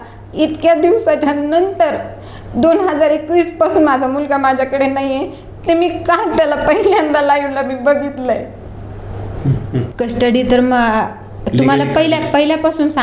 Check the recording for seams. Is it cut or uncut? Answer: cut